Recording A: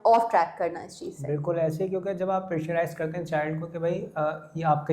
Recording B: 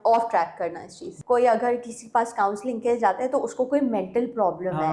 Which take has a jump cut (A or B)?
B